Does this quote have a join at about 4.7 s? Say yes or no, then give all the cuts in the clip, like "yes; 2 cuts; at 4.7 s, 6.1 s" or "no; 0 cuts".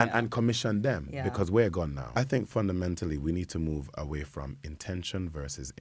no; 1 cut; at 2.2 s